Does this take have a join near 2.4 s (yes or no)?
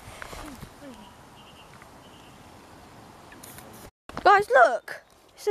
no